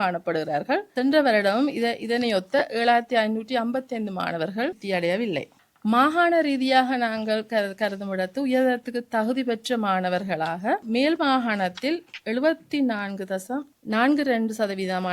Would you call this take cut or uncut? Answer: cut